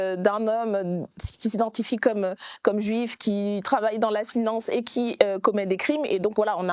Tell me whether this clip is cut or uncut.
uncut